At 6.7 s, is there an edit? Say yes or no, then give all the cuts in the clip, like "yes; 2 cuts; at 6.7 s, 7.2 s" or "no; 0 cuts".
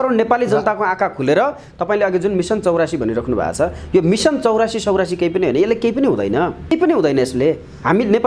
yes; 1 cut; at 6.7 s